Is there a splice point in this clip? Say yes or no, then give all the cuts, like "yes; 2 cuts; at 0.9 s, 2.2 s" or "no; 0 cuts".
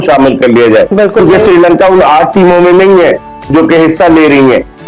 no; 0 cuts